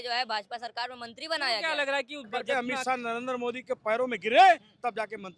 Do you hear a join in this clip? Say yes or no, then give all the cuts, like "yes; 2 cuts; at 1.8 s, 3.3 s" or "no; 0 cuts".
yes; 1 cut; at 2.4 s